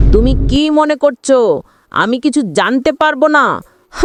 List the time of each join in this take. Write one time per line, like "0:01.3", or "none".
none